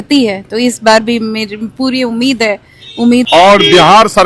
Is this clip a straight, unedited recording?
no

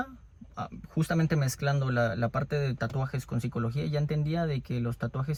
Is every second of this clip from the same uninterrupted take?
yes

